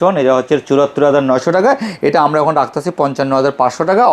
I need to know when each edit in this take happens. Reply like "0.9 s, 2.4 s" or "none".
none